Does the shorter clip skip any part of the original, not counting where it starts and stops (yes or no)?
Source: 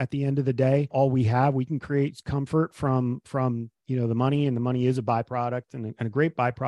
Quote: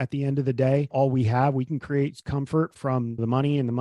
yes